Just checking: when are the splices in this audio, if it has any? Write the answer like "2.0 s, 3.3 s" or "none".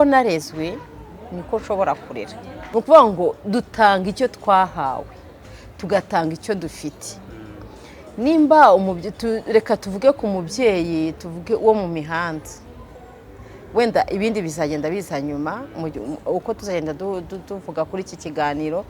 2.6 s